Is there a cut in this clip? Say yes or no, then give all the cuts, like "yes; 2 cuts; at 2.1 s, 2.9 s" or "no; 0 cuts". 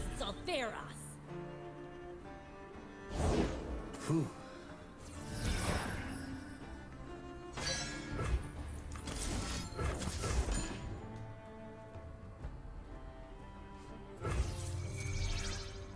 no; 0 cuts